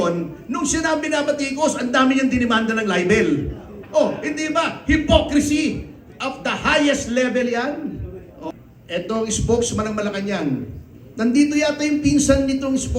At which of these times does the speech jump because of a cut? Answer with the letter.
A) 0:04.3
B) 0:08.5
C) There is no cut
B